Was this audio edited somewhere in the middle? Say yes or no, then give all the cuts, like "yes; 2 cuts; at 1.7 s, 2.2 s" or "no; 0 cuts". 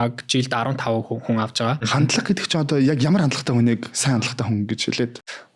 yes; 1 cut; at 1.8 s